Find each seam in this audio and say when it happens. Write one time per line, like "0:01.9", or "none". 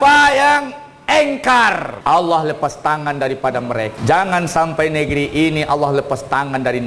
0:01.9
0:04.0